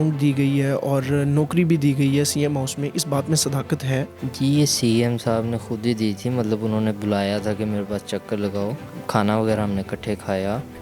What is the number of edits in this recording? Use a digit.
2